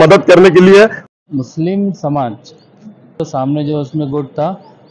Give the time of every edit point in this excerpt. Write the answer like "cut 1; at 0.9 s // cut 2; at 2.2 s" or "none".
cut 1; at 1.1 s // cut 2; at 3.2 s